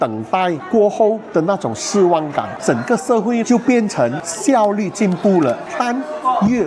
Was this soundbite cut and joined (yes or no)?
yes